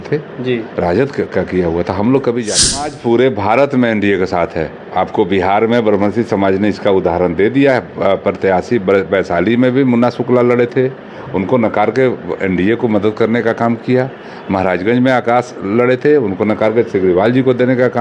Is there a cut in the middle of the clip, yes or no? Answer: yes